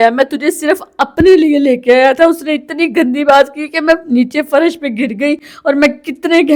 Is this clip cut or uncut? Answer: uncut